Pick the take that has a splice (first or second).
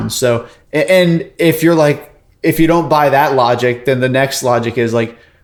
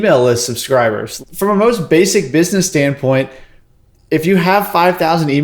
second